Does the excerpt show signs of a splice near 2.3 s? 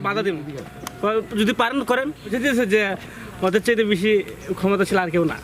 yes; 1 cut; at 2.3 s

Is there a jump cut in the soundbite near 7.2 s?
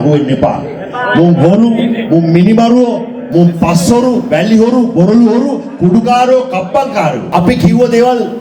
yes; 1 cut; at 7.2 s

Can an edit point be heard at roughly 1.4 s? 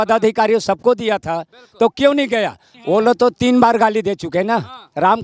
no; 1 cut; at 2.7 s

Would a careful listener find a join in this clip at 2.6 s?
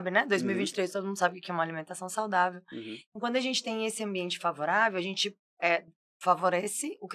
no; 0 cuts

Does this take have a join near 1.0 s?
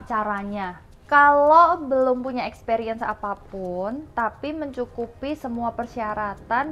yes; 1 cut; at 1.0 s

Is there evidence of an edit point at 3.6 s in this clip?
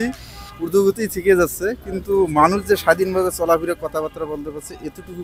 no; 0 cuts

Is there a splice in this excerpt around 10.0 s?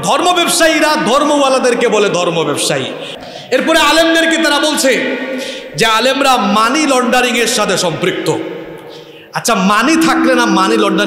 no; 1 cut; at 3.1 s

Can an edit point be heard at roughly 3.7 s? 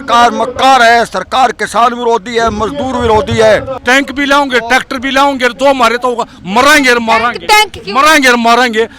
yes; 1 cut; at 3.7 s

